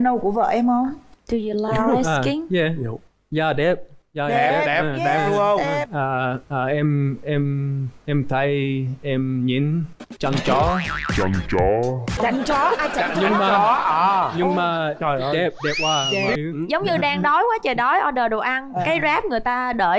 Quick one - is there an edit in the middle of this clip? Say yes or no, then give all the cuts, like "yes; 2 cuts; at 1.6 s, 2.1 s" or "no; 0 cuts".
yes; 2 cuts; at 5.9 s, 16.4 s